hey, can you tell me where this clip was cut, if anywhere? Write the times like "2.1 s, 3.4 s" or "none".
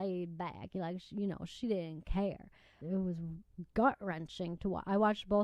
2.8 s